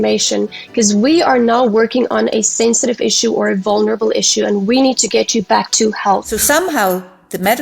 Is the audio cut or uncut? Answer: cut